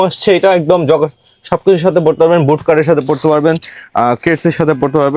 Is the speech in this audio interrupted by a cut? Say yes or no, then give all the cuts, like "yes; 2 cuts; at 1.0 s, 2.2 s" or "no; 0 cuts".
no; 0 cuts